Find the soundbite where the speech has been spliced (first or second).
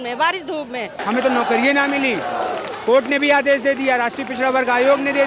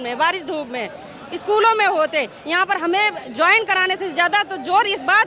first